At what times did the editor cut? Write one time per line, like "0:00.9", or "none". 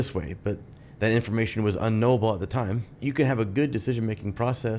0:02.9